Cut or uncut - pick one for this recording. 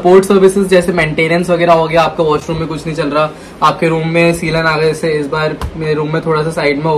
uncut